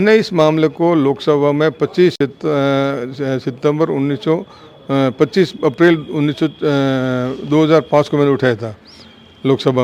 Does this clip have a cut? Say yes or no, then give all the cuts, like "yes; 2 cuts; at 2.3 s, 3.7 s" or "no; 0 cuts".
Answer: no; 0 cuts